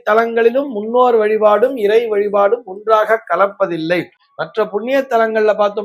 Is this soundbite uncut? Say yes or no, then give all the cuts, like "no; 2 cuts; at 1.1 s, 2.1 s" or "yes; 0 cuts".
yes; 0 cuts